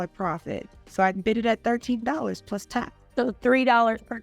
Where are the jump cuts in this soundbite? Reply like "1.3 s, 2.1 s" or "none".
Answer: 3.0 s